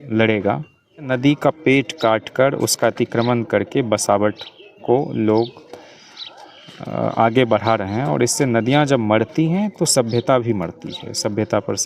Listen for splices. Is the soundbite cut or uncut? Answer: cut